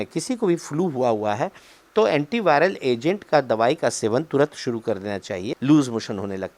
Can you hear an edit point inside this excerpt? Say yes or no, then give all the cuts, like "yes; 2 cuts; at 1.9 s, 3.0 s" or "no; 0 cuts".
yes; 1 cut; at 5.5 s